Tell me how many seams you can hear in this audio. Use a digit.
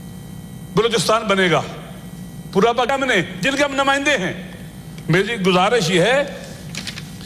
1